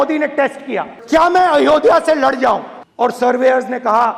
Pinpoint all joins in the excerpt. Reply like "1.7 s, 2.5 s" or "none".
0.9 s, 2.8 s